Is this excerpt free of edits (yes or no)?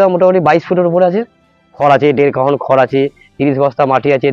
no